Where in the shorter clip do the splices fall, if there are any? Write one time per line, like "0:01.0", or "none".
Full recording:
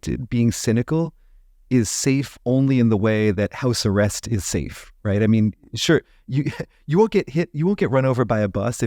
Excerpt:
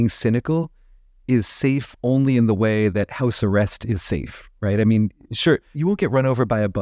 0:05.7